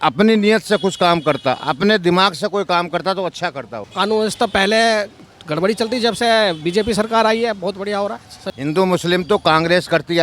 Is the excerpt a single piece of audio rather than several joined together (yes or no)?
no